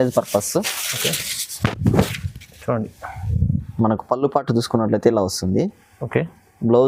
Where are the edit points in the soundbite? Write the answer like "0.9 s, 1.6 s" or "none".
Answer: none